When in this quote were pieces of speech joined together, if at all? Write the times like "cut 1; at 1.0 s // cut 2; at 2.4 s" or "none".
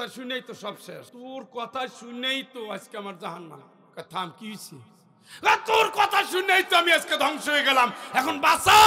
cut 1; at 1.1 s

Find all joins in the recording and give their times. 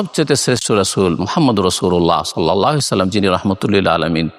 none

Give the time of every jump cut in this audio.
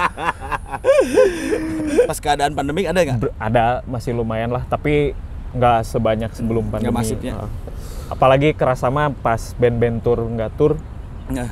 cut 1; at 2.1 s

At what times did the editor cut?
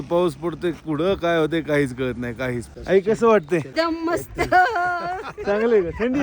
cut 1; at 2.7 s // cut 2; at 3.7 s

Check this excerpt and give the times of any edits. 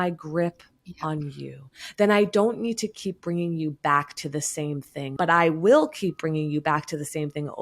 cut 1; at 5.1 s

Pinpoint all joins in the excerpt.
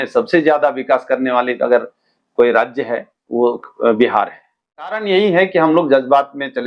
cut 1; at 4.9 s

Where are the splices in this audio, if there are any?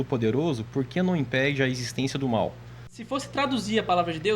cut 1; at 3.0 s

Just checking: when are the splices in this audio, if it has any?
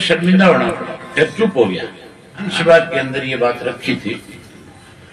cut 1; at 2.5 s

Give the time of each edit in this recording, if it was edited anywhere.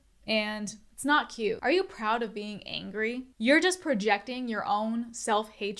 cut 1; at 3.3 s

